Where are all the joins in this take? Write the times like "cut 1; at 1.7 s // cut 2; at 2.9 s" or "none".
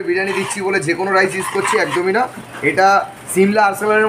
none